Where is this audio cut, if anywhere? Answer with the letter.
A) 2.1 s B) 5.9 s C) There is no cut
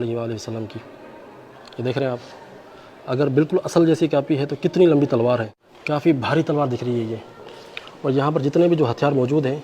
B